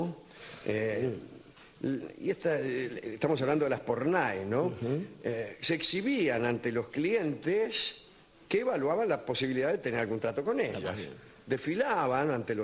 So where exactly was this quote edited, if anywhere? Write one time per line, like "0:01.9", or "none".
none